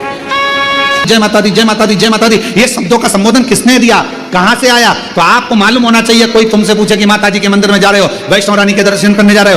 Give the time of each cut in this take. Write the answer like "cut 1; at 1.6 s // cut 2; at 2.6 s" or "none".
cut 1; at 1.1 s